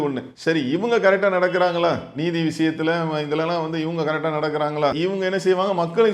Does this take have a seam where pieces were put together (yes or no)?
yes